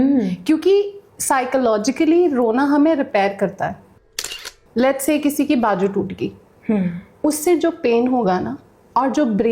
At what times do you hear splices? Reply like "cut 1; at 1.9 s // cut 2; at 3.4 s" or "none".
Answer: cut 1; at 4.2 s